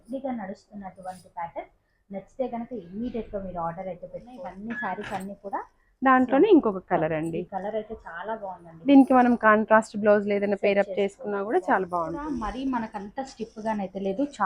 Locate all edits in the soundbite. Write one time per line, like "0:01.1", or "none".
0:04.3
0:12.3